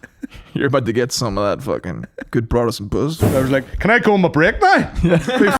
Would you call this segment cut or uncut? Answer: cut